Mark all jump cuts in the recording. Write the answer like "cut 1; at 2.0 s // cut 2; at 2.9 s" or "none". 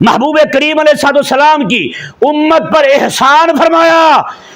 none